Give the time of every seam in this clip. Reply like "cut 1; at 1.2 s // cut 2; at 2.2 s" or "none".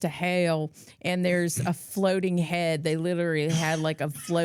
none

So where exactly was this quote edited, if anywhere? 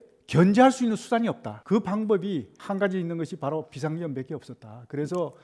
cut 1; at 1.5 s // cut 2; at 2.5 s

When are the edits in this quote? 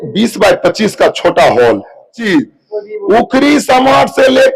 cut 1; at 2.3 s

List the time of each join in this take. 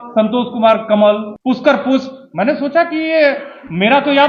cut 1; at 1.3 s

